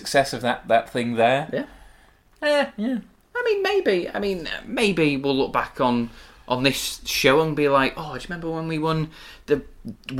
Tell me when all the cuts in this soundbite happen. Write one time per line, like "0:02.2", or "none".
none